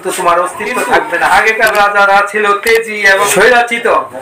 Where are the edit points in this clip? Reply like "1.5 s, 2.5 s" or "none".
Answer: 1.3 s, 3.2 s